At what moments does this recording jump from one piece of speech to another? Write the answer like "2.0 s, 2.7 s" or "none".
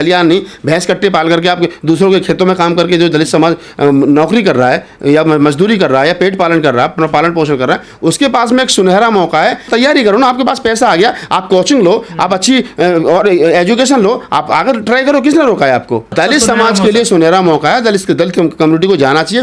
9.7 s, 16.1 s